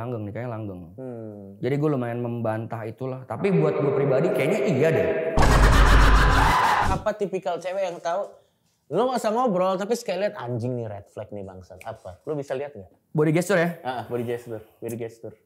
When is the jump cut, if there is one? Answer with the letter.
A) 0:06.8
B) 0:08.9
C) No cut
A